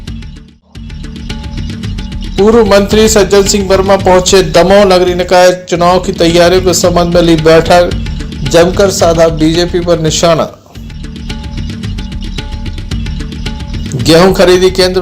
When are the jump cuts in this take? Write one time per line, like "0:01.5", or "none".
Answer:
0:01.0